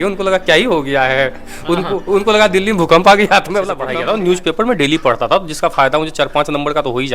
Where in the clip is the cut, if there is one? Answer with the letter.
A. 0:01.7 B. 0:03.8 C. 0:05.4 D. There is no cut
B